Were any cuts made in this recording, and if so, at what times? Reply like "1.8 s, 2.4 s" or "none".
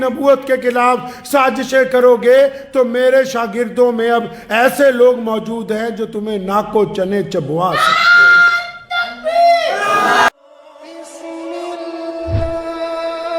10.3 s